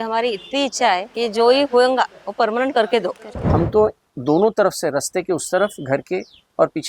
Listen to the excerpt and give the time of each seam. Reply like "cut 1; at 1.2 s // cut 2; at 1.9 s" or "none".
cut 1; at 1.1 s // cut 2; at 3.5 s